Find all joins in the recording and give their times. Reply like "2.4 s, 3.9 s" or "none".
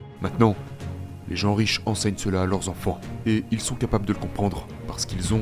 3.1 s